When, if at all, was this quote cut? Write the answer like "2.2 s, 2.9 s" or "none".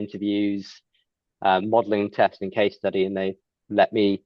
none